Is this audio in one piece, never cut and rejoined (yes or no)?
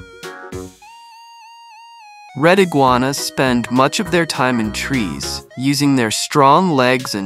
no